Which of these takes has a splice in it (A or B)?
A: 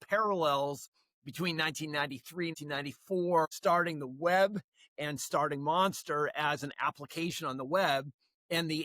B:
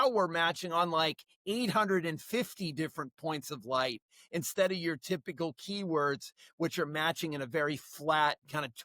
A